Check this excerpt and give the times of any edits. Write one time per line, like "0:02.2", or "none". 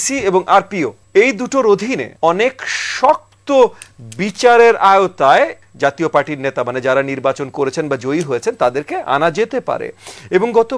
0:01.0
0:02.1
0:05.6